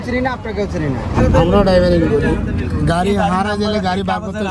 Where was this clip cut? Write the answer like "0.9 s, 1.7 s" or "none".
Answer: 1.1 s